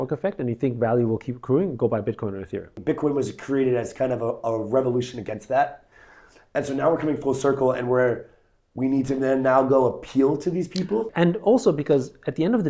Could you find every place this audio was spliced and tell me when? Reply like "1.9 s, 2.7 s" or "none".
2.7 s, 11.1 s